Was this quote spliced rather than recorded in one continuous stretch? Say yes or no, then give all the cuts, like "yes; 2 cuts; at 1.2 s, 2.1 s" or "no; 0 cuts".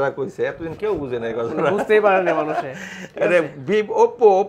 no; 0 cuts